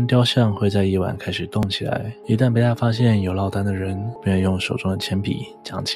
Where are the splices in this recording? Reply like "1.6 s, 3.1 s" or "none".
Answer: 2.1 s, 4.1 s